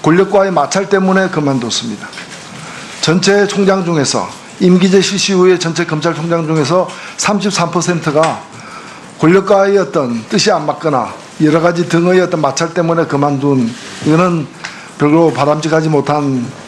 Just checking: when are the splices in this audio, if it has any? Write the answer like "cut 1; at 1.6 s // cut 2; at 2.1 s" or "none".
cut 1; at 1.0 s